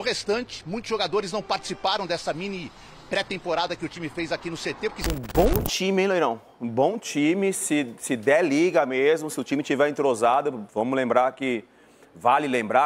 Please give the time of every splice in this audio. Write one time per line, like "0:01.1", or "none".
0:05.1